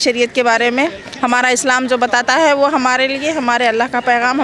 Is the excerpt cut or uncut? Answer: uncut